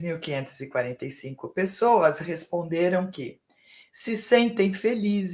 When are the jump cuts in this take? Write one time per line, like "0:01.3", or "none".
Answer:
none